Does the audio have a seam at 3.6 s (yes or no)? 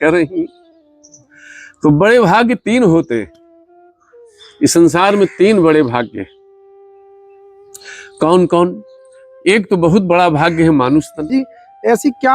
no